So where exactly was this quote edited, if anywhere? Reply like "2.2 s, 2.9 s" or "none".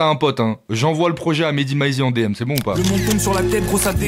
2.8 s